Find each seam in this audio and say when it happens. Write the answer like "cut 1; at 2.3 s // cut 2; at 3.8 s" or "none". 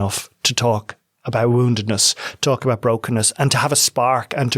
none